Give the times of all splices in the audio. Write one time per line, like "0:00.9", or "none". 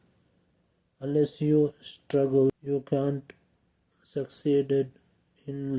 0:02.5